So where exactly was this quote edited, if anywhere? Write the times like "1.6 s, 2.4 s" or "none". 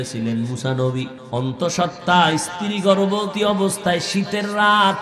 1.2 s, 3.3 s